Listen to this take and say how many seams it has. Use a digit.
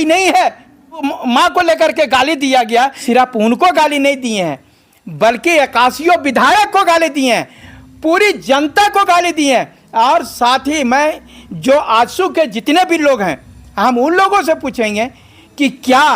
2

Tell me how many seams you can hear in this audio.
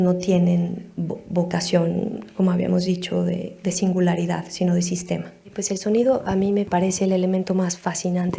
2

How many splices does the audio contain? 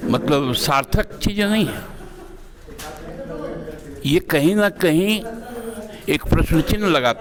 0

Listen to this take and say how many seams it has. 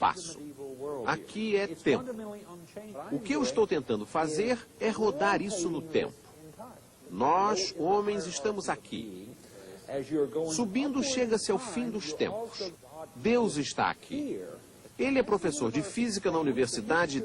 1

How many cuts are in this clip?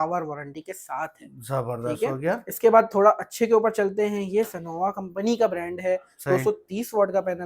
0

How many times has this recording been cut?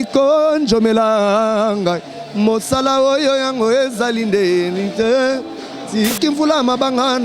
1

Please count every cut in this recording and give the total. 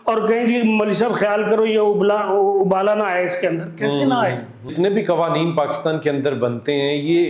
1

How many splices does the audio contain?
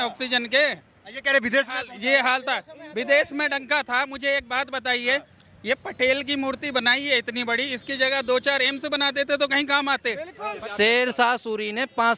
1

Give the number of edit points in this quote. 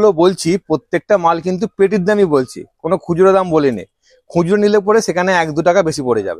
0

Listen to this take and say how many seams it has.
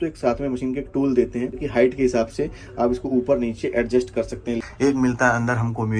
2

